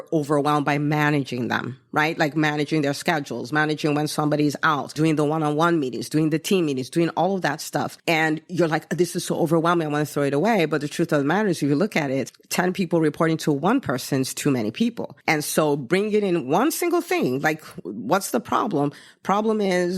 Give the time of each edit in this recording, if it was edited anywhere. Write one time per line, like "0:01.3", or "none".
0:04.9
0:07.9
0:12.4
0:15.1